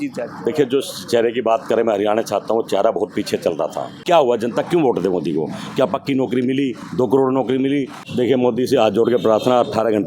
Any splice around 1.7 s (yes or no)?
no